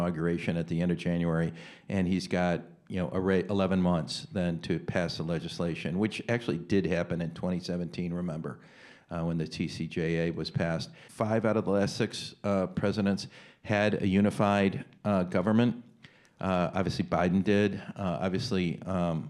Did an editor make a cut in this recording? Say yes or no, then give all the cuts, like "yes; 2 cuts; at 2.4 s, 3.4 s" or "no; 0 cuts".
yes; 1 cut; at 11.0 s